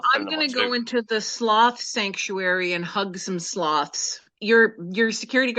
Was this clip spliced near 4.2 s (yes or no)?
yes